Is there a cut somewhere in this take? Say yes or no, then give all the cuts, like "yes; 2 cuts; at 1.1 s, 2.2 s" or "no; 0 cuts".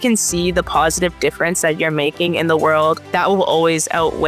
yes; 1 cut; at 3.0 s